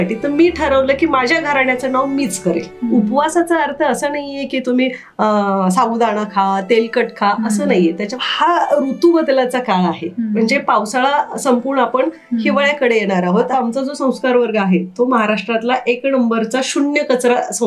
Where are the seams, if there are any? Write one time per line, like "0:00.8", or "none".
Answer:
0:02.7
0:08.1
0:13.5